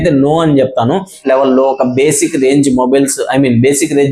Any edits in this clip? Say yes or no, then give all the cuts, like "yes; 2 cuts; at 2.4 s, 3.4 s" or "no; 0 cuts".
yes; 1 cut; at 1.2 s